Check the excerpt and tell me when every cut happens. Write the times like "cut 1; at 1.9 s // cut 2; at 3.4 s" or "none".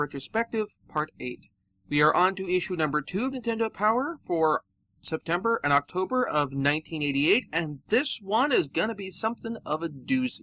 cut 1; at 1.9 s